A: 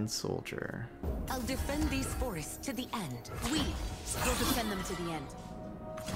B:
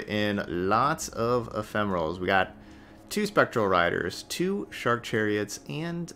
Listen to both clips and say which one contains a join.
A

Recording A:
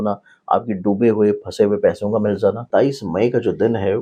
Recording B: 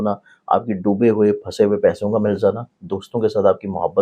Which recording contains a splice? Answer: A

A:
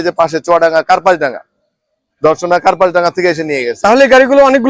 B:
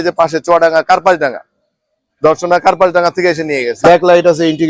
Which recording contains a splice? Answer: B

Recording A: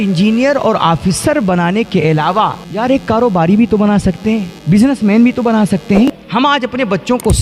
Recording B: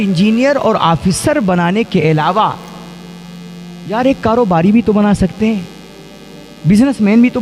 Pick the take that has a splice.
A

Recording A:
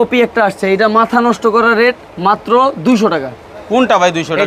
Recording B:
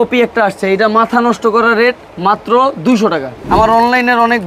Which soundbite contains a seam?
B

